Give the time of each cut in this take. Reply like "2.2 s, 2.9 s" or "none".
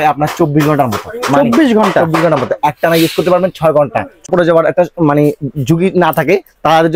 4.3 s